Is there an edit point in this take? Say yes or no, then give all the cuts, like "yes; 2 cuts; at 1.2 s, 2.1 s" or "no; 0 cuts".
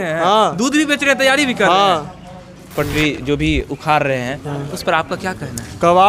yes; 1 cut; at 2.7 s